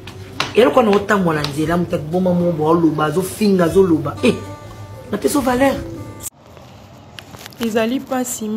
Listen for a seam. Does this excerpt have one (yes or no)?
yes